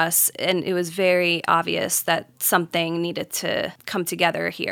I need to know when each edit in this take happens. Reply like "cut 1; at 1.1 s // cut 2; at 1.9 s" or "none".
cut 1; at 3.8 s